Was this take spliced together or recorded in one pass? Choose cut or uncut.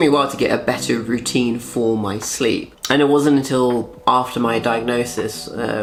uncut